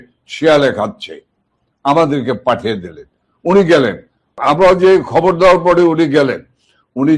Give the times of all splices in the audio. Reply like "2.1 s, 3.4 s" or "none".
4.4 s

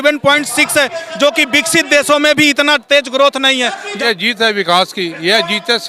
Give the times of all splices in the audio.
3.9 s

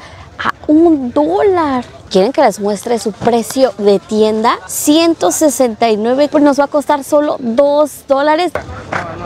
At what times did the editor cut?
2.0 s, 4.7 s, 6.3 s, 8.5 s

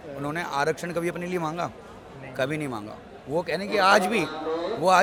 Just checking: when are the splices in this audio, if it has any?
none

